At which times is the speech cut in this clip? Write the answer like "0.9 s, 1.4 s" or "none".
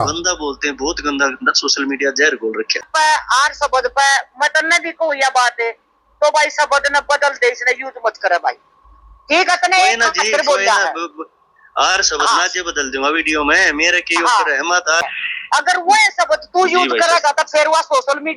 2.9 s, 15.2 s